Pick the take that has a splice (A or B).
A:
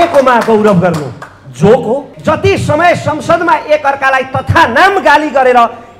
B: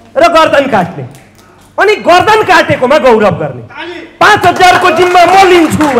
A